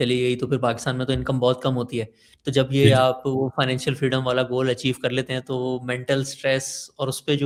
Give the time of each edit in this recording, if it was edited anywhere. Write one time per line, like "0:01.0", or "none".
none